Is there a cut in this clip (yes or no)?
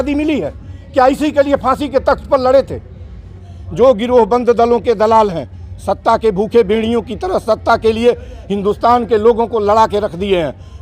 yes